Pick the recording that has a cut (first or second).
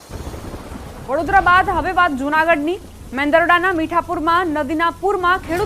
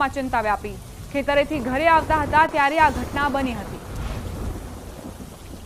first